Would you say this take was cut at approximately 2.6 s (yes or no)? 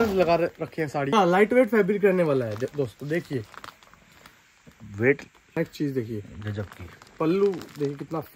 no